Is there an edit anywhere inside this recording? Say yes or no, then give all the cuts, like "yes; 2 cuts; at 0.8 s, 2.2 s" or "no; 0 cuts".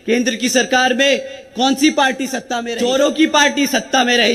yes; 1 cut; at 2.5 s